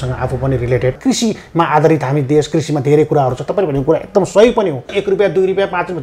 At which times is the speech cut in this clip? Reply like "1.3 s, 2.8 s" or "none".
1.0 s, 5.0 s